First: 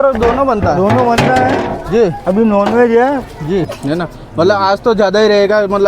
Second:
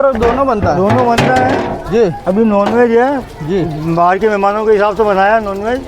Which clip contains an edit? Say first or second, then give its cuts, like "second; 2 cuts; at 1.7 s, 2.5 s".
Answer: first; 1 cut; at 3.7 s